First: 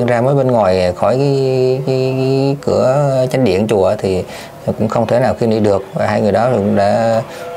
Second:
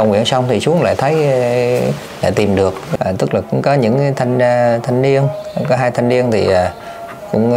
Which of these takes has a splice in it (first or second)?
second